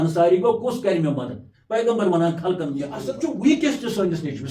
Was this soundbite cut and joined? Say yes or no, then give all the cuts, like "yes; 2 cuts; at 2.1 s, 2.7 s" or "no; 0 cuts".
yes; 1 cut; at 3.0 s